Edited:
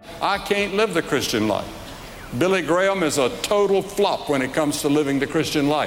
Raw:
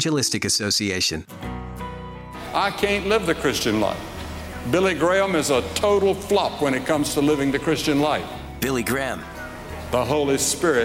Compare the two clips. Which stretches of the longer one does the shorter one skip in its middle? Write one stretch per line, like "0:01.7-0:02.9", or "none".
none

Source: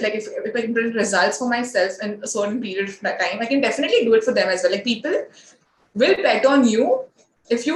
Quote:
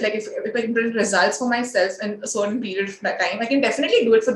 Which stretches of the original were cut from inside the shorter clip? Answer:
none

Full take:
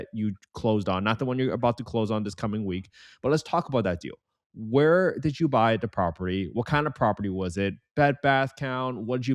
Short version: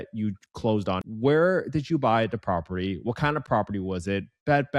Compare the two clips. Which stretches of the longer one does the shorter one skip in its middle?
0:01.0-0:04.5

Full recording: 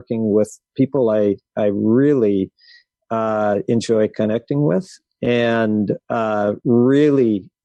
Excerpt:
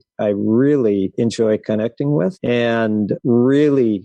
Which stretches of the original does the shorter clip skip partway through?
0:02.5-0:03.6
0:05.1-0:06.1

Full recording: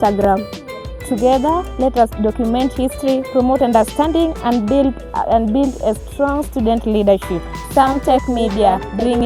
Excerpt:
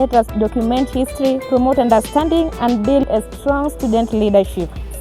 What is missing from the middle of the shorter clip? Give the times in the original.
0:04.9-0:05.8

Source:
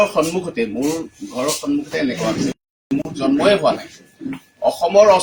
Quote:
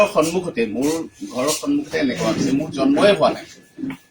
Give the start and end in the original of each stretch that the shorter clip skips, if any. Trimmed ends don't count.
0:02.5-0:03.0

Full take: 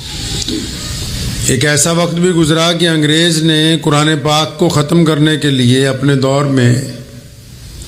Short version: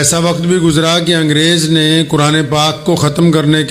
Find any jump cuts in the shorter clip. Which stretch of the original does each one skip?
none

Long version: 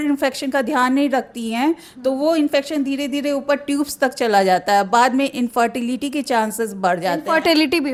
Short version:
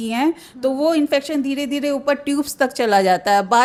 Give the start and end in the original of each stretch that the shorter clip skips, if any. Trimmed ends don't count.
none

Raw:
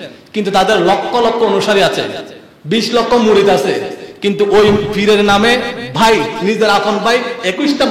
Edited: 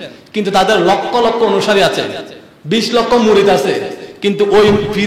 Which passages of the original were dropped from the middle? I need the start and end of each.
none

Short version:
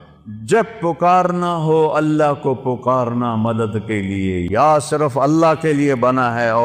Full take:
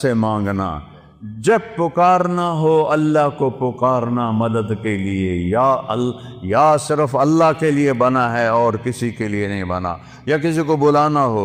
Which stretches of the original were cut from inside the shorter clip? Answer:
0:05.4-0:06.4

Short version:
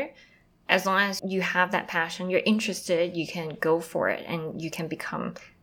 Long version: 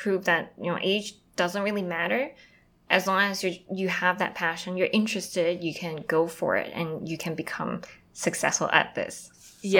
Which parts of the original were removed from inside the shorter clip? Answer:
0:03.4-0:03.6

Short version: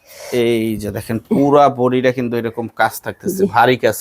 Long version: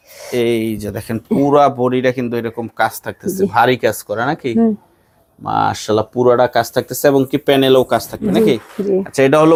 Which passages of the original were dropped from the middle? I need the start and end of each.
none

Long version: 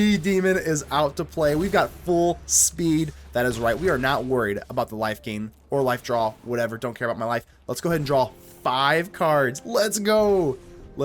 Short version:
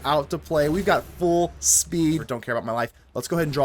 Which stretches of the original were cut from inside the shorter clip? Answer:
0:03.2-0:06.8

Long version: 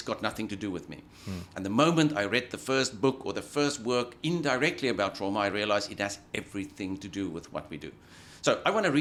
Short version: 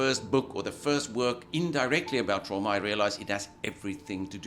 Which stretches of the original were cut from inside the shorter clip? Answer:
none

